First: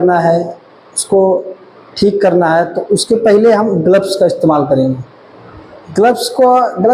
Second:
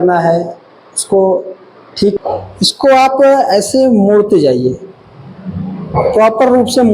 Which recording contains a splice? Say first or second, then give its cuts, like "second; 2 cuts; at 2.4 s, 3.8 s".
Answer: second; 1 cut; at 2.2 s